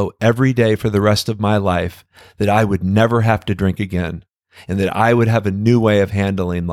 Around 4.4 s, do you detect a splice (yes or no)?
no